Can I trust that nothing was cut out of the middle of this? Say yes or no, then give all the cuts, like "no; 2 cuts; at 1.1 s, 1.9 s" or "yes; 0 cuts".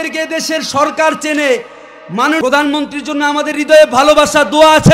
no; 1 cut; at 2.4 s